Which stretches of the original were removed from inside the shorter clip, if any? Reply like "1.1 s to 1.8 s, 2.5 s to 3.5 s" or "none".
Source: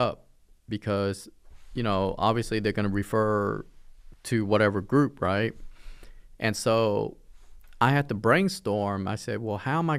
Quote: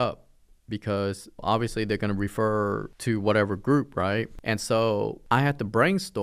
1.4 s to 2.2 s, 3.7 s to 4.2 s, 5.6 s to 6.3 s, 7.1 s to 7.7 s